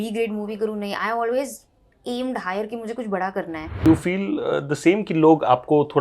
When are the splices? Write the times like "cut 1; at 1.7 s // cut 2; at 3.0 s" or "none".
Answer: cut 1; at 3.8 s